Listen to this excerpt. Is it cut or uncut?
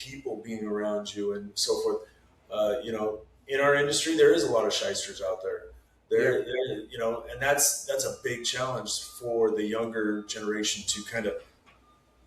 uncut